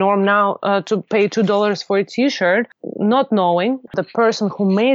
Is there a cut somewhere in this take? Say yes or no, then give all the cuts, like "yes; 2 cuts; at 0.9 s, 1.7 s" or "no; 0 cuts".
yes; 1 cut; at 3.9 s